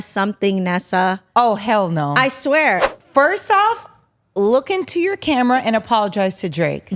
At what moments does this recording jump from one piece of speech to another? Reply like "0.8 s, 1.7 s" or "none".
2.9 s